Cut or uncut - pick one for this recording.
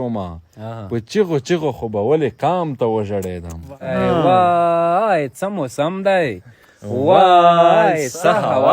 cut